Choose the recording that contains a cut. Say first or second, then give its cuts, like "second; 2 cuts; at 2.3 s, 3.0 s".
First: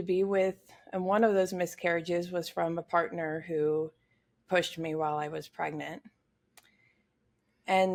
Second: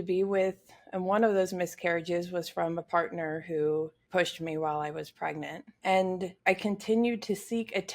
second; 3 cuts; at 4.0 s, 5.6 s, 6.3 s